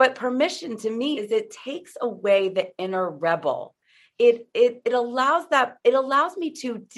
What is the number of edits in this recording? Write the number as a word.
one